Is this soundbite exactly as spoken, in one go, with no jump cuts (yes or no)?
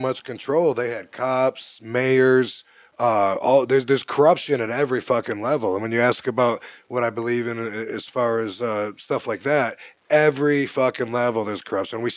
yes